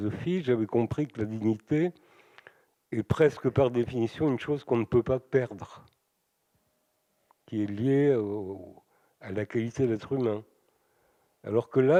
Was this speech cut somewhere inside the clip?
no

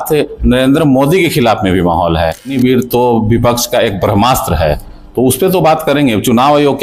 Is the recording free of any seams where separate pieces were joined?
no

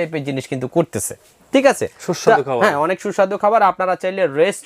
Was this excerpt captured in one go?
yes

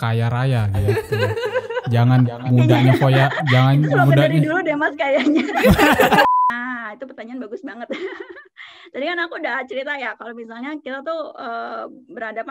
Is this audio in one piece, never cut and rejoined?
no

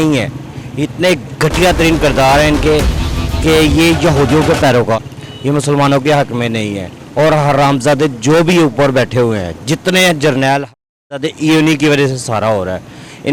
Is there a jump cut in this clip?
yes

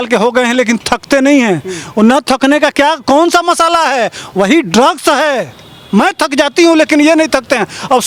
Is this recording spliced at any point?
no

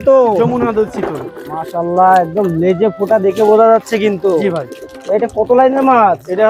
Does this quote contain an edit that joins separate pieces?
no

